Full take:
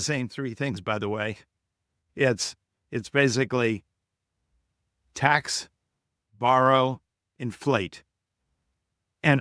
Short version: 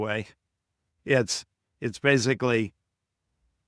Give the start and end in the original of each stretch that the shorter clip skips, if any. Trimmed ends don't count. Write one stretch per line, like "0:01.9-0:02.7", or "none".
none